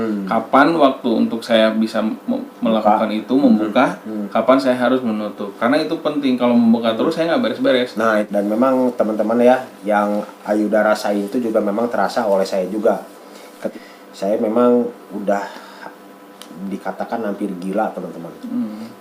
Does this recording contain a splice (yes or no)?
yes